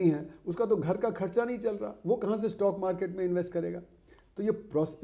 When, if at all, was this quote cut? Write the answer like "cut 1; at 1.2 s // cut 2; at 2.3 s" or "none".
none